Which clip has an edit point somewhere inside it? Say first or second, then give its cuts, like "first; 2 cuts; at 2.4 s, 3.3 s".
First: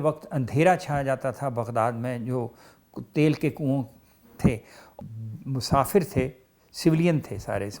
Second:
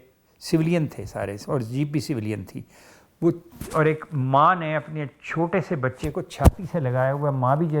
first; 1 cut; at 4.8 s